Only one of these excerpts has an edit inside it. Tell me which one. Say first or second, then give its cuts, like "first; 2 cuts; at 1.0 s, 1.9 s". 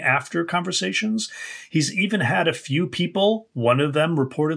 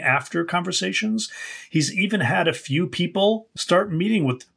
second; 1 cut; at 3.5 s